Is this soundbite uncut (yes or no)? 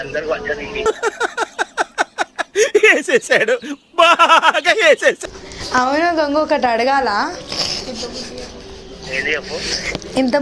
no